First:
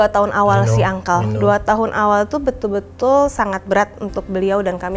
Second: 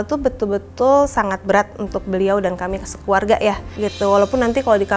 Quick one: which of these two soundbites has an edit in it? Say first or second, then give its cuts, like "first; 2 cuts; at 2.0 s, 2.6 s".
second; 1 cut; at 3.8 s